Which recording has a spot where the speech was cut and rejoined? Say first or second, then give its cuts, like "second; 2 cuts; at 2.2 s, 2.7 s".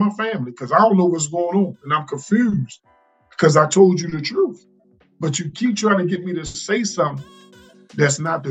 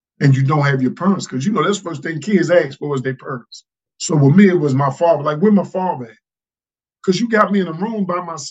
second; 1 cut; at 3.8 s